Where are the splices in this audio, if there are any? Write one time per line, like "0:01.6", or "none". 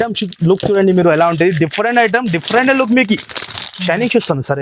none